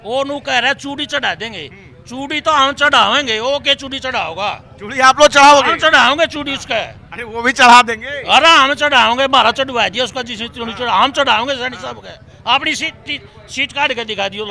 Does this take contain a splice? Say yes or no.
no